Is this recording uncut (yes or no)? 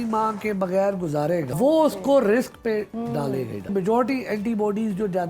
no